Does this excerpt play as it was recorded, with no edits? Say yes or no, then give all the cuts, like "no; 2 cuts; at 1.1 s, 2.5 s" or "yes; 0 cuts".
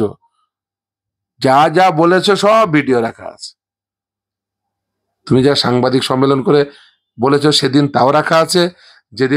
yes; 0 cuts